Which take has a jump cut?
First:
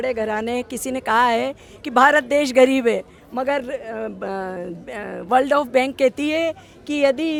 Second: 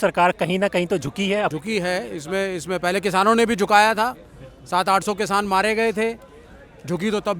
second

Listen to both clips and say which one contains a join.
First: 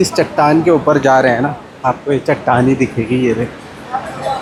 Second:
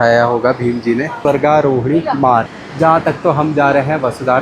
second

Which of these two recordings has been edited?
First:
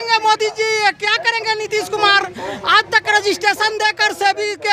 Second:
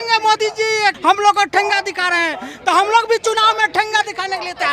second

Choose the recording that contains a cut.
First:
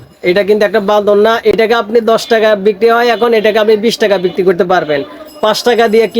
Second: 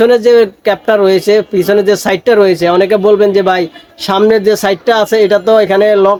first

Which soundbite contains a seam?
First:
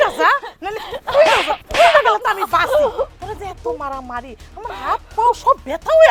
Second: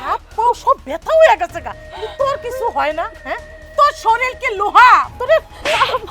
second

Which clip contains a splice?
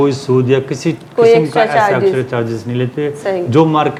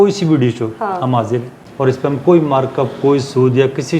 second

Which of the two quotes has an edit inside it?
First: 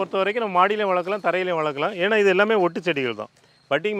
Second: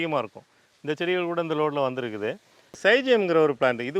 second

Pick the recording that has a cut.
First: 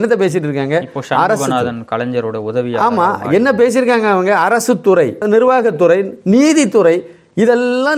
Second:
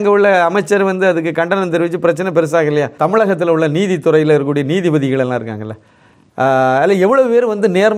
second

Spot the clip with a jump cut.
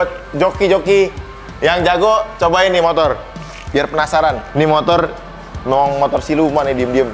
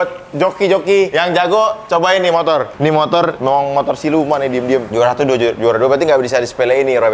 second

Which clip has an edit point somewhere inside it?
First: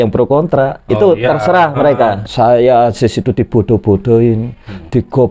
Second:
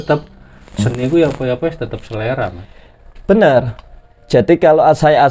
first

